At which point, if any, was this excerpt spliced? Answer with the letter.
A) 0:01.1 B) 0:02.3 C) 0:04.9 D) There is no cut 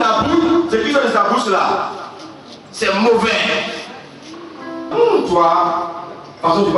C